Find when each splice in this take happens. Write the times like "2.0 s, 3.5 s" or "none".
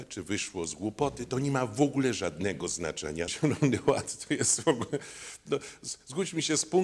3.3 s